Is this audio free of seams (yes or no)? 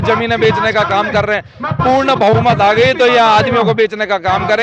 yes